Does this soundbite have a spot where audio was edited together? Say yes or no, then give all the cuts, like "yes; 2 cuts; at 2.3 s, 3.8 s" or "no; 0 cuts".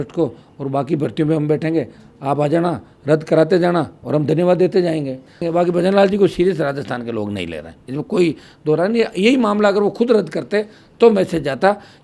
yes; 1 cut; at 5.3 s